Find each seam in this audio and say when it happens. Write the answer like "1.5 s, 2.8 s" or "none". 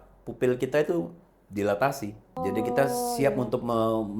2.3 s